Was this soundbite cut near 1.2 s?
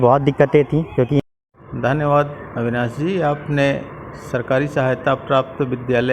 yes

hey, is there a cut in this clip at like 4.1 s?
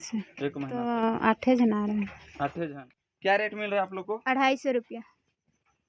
no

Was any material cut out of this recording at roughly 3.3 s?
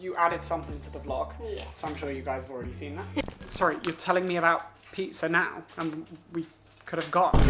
yes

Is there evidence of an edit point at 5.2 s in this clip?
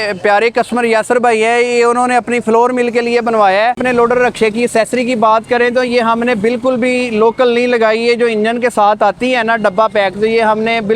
no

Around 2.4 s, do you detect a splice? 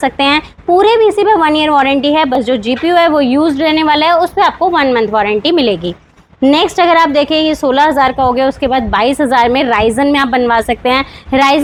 no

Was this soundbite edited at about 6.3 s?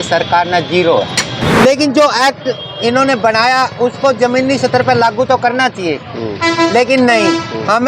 no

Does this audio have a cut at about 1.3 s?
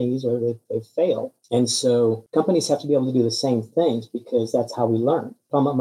yes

